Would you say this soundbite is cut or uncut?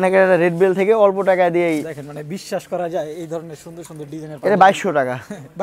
uncut